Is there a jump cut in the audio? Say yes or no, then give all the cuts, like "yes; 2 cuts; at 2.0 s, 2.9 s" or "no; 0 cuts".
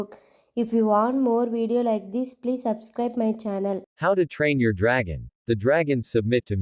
yes; 1 cut; at 3.9 s